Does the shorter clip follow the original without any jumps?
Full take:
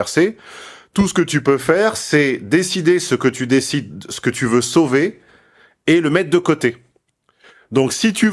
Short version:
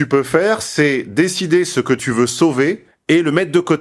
no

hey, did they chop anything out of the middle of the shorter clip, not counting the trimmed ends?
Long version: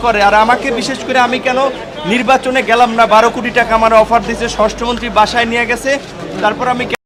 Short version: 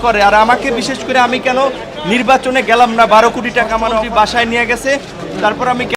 yes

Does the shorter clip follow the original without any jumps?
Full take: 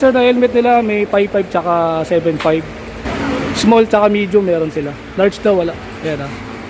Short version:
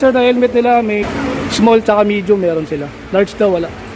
no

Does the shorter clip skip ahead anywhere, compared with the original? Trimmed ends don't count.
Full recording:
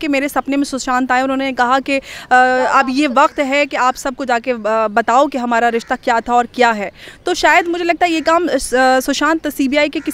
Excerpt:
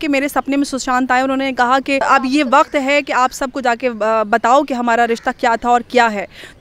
yes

